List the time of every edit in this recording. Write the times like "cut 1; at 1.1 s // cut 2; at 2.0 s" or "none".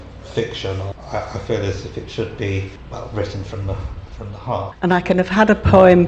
cut 1; at 0.9 s // cut 2; at 2.8 s // cut 3; at 4.7 s